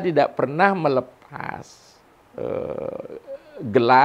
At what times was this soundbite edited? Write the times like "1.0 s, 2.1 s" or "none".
none